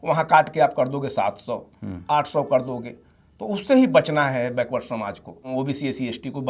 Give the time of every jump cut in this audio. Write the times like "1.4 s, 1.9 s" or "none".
5.5 s